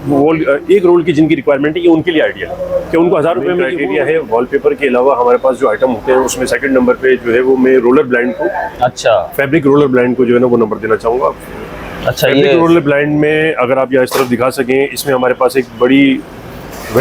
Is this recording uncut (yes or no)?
no